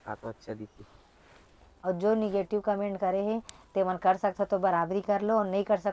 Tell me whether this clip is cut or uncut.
cut